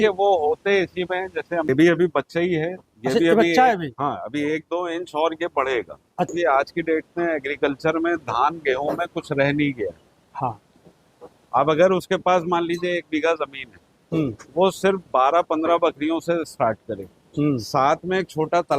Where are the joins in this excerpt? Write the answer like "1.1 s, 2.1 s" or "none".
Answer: 1.7 s, 6.3 s

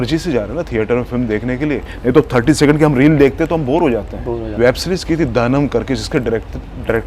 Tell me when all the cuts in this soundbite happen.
4.4 s

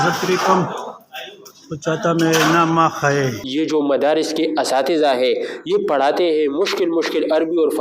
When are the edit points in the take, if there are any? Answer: 3.4 s

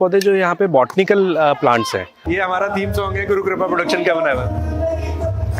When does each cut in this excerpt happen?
2.2 s

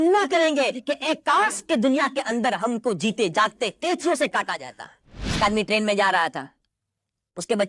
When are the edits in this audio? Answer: 5.4 s

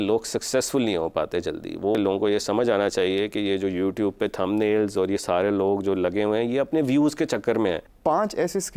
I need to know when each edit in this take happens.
2.0 s, 7.9 s

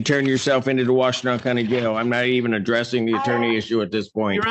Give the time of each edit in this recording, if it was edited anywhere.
none

